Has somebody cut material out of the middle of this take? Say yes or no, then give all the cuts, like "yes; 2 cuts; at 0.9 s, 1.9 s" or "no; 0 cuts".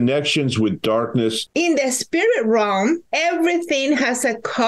yes; 2 cuts; at 1.4 s, 3.1 s